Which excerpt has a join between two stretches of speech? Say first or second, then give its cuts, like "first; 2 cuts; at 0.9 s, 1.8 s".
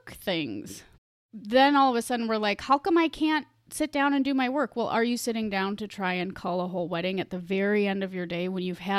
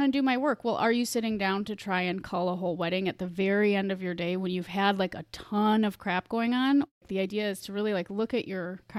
second; 1 cut; at 6.9 s